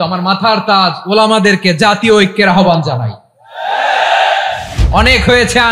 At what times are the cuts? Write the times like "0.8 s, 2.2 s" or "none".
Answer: 4.8 s